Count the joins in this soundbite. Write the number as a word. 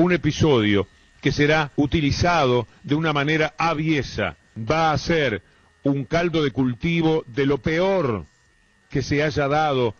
zero